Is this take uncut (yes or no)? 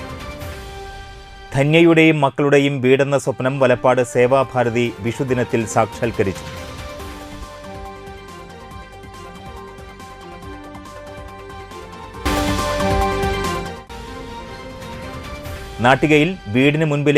yes